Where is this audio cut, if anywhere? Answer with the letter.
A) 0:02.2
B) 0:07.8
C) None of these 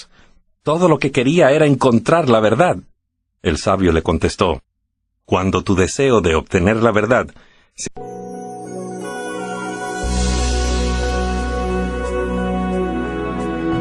C